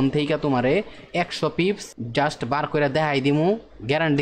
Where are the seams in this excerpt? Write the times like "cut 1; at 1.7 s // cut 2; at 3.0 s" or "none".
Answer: cut 1; at 1.9 s